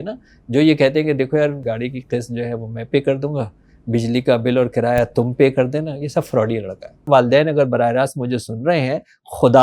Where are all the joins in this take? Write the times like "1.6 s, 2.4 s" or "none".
1.6 s, 7.1 s